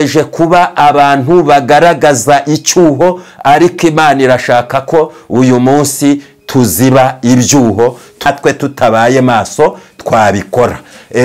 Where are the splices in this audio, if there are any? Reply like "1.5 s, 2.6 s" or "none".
8.2 s